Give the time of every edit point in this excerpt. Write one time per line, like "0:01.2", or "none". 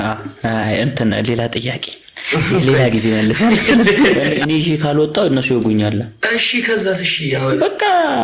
0:04.2